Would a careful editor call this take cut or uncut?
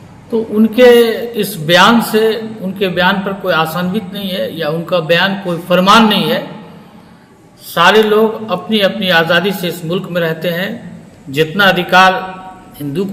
uncut